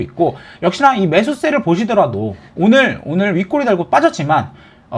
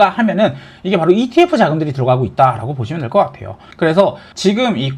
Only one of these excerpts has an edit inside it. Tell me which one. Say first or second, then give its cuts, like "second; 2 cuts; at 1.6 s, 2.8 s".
first; 1 cut; at 2.5 s